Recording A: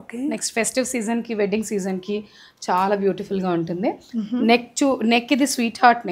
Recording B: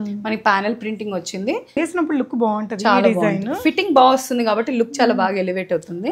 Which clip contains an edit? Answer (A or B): B